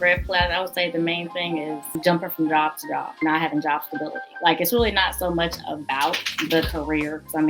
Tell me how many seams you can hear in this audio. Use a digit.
3